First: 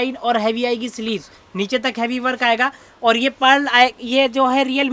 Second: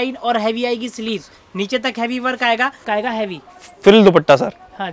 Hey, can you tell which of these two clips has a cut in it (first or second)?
second